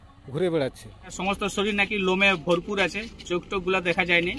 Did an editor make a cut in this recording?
yes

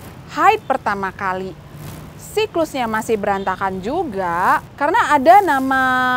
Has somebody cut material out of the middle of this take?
yes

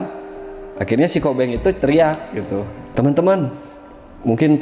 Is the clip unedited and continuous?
no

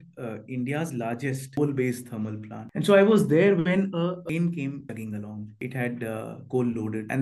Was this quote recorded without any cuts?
no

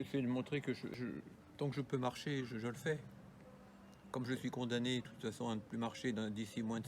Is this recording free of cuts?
no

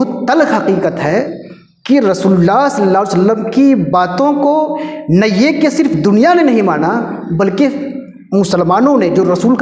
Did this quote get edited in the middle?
no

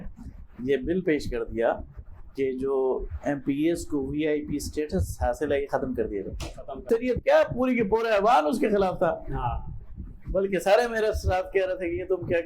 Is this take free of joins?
no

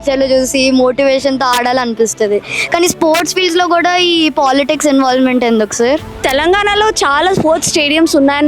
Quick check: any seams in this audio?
yes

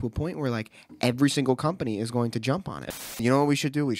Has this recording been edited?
yes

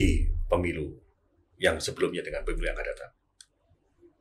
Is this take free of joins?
yes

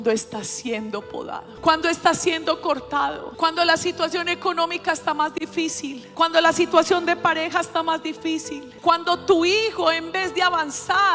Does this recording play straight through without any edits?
no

